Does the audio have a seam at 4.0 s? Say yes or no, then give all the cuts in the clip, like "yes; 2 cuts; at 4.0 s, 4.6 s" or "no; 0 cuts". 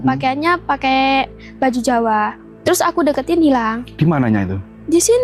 no; 1 cut; at 2.4 s